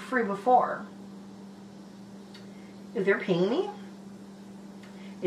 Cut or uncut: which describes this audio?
uncut